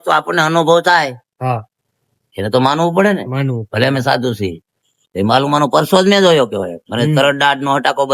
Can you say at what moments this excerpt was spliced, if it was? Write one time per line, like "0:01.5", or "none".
none